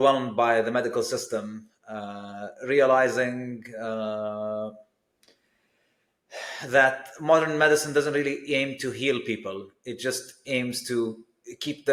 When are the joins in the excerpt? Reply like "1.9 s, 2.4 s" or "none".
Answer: none